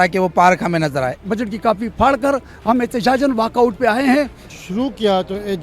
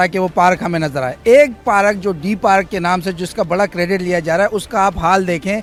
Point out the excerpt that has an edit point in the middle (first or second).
first